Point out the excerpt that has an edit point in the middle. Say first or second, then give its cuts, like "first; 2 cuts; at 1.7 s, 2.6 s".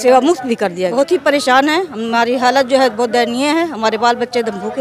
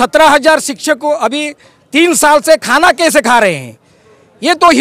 first; 1 cut; at 0.9 s